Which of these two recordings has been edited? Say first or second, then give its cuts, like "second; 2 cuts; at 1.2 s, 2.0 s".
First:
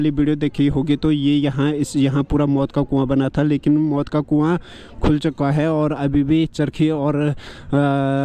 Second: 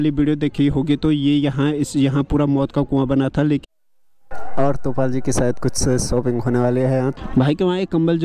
second; 2 cuts; at 3.6 s, 7.2 s